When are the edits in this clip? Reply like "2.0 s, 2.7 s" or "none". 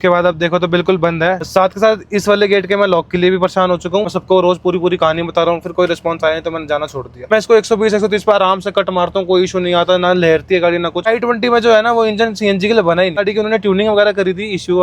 1.5 s, 4.1 s, 7.1 s, 11.1 s, 13.2 s